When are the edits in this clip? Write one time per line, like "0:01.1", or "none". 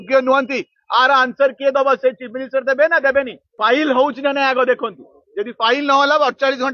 0:03.4